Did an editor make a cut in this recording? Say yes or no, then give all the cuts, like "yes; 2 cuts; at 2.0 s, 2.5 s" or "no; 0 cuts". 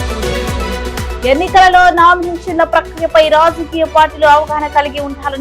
no; 0 cuts